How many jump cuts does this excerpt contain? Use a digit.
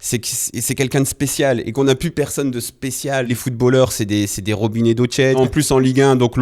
2